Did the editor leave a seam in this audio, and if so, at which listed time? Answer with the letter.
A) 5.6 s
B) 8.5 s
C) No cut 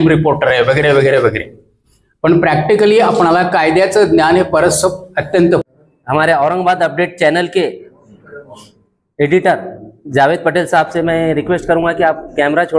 A